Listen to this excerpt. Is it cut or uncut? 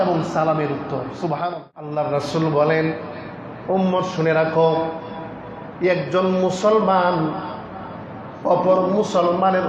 cut